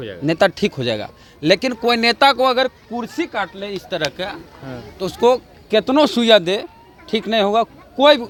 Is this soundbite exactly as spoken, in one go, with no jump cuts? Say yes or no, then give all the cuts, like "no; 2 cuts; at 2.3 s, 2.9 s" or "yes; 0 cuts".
yes; 0 cuts